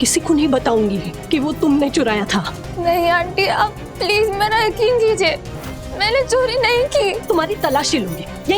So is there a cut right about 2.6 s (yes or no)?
yes